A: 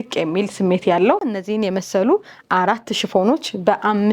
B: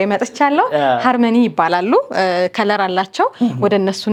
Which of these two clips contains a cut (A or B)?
A